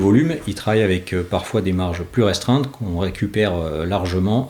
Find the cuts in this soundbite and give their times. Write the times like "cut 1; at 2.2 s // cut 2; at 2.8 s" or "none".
none